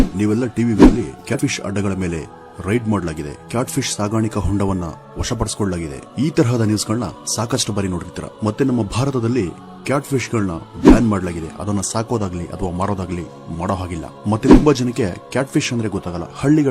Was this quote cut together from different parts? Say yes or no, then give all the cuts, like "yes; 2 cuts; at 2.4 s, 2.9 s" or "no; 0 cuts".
yes; 1 cut; at 1.3 s